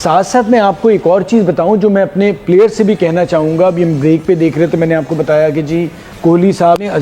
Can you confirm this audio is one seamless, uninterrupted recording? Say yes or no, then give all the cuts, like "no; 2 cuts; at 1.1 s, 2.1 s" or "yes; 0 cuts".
yes; 0 cuts